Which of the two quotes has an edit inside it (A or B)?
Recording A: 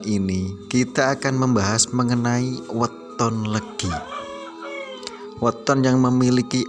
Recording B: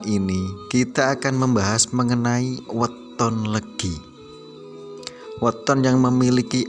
A